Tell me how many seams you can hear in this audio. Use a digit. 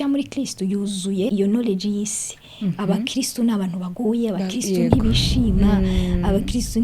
1